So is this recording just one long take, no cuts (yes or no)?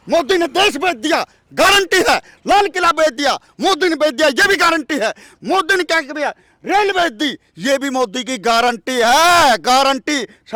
yes